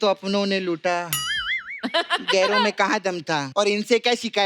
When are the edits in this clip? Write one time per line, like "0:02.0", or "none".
0:03.5